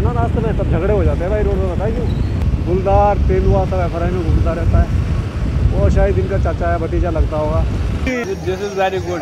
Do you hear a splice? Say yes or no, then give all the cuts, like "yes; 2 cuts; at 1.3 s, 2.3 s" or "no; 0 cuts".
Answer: yes; 2 cuts; at 2.4 s, 8.1 s